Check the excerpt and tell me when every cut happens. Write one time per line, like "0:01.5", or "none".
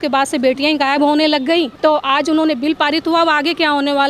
0:01.7